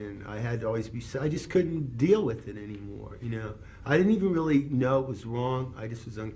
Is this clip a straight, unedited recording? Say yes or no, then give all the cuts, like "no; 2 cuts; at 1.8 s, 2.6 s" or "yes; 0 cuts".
no; 1 cut; at 3.1 s